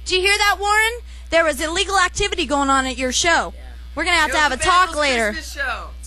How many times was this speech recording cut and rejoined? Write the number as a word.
zero